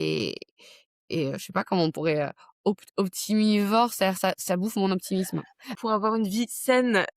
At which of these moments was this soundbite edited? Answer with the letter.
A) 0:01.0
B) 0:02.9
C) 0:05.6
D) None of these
C